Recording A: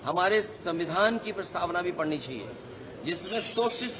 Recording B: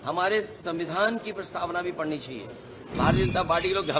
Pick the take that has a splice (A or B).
B